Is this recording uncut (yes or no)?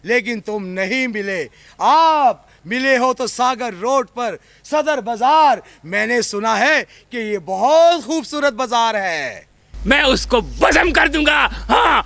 no